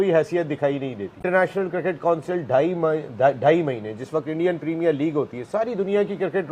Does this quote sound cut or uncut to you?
cut